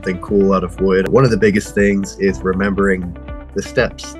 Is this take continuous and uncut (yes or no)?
no